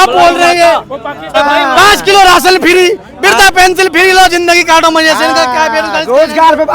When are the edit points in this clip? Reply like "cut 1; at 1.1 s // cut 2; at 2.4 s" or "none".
cut 1; at 1.3 s